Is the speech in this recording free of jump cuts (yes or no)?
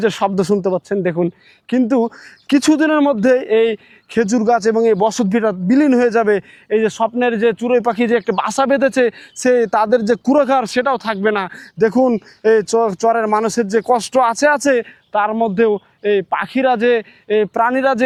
yes